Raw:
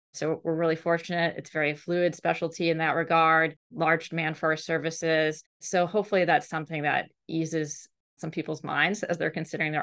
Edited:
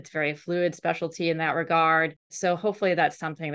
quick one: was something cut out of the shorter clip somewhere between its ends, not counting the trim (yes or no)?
yes